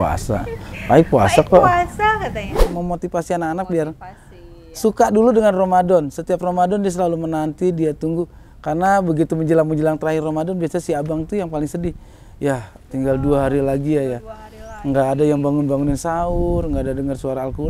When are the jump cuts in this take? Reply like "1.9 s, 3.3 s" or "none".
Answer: 2.7 s